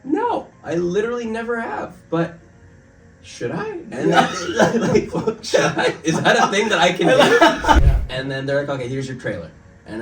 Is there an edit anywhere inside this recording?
yes; 1 cut; at 7.8 s

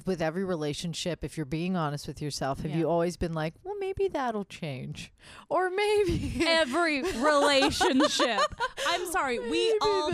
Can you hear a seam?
no; 0 cuts

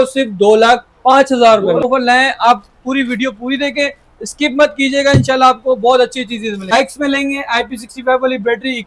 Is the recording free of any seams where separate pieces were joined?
no; 2 cuts; at 1.8 s, 6.7 s

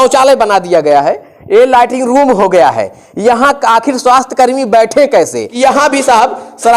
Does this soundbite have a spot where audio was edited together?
yes; 1 cut; at 5.4 s

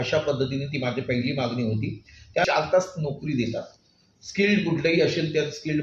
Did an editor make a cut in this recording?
yes; 1 cut; at 2.4 s

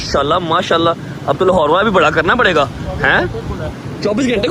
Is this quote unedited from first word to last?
yes; 0 cuts

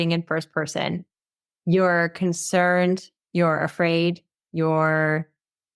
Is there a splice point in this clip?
yes; 2 cuts; at 3.2 s, 4.3 s

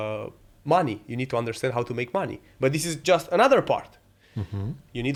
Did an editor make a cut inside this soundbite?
no; 0 cuts

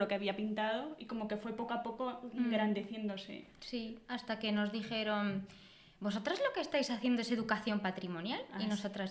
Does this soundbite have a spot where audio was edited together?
no; 0 cuts

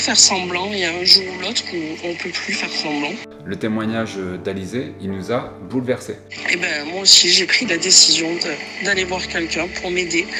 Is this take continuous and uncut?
no; 1 cut; at 3.3 s

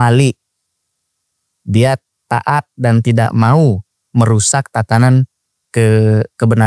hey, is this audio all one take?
yes; 0 cuts

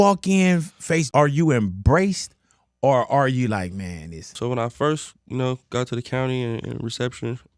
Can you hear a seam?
yes; 2 cuts; at 1.1 s, 4.4 s

